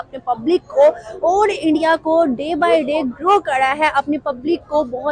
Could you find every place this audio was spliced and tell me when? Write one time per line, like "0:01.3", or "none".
none